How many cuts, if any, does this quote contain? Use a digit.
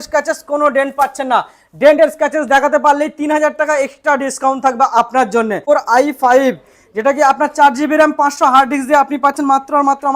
1